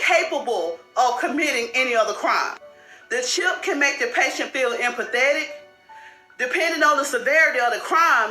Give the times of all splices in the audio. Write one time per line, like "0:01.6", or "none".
0:04.0

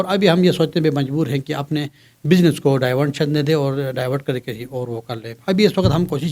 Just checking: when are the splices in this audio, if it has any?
none

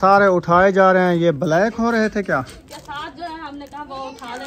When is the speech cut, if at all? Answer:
0:02.7

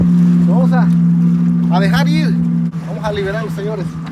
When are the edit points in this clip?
0:02.7

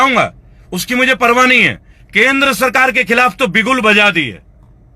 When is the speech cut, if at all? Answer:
0:02.0

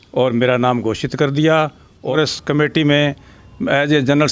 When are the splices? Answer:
0:02.1

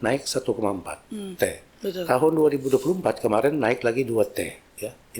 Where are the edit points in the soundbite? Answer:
none

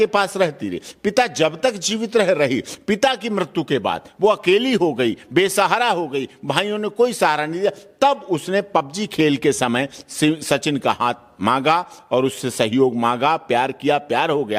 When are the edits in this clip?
none

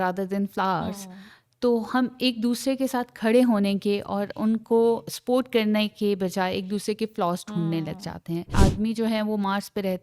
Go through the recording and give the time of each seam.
0:08.5

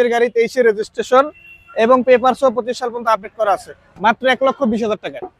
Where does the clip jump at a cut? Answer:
0:03.8

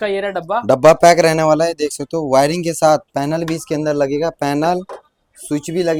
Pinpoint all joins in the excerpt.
none

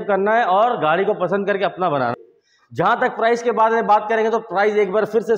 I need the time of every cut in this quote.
0:02.1

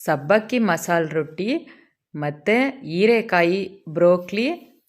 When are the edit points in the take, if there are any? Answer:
none

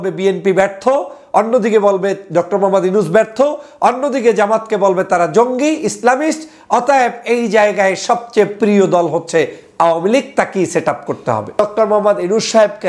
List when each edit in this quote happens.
0:11.6

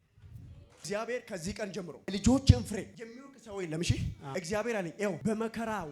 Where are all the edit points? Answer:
0:02.1
0:03.0
0:04.2
0:05.2

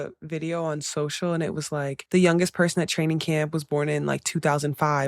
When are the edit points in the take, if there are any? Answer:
0:02.0

